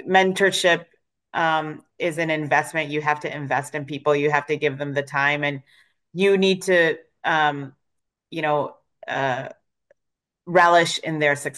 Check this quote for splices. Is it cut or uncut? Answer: uncut